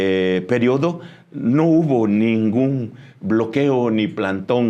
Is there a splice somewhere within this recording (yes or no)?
no